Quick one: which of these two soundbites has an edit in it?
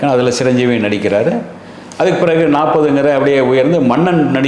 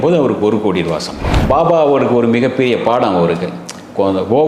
second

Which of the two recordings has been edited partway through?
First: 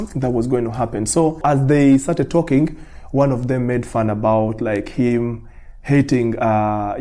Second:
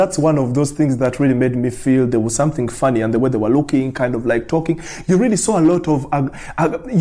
first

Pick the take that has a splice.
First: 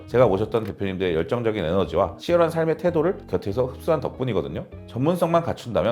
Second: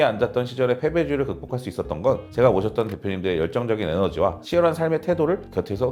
first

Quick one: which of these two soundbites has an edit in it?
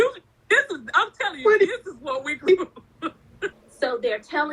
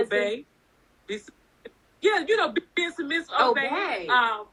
first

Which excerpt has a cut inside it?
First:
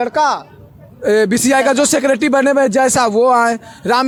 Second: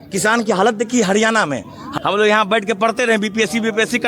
second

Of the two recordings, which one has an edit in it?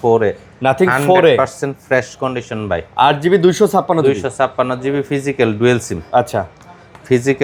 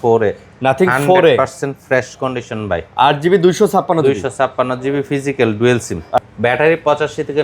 second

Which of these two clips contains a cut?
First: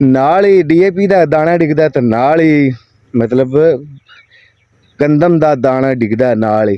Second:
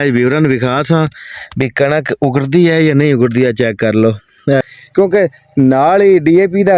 second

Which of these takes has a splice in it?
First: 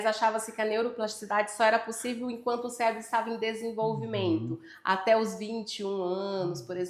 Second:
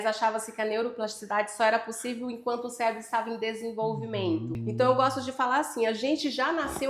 second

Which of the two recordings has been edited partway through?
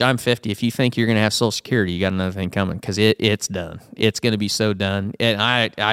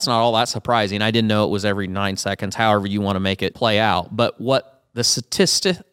second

